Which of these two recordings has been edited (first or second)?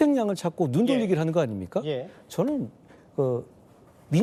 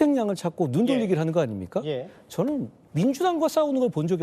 second